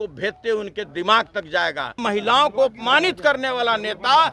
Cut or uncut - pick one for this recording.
cut